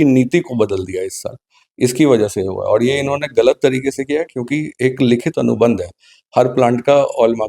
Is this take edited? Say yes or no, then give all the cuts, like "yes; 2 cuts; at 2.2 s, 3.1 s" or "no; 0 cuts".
no; 0 cuts